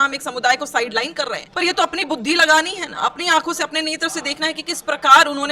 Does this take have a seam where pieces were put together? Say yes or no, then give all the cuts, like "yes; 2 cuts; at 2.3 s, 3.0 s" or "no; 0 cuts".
yes; 1 cut; at 1.4 s